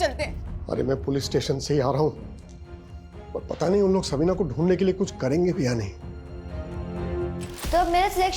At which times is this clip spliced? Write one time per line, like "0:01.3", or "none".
0:07.4